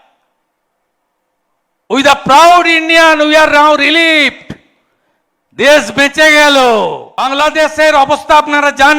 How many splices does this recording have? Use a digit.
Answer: 1